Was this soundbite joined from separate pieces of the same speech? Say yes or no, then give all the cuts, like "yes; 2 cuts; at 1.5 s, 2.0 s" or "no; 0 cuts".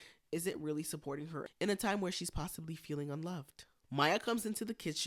no; 0 cuts